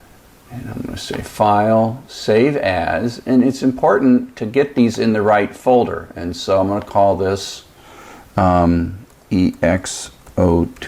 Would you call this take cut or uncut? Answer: cut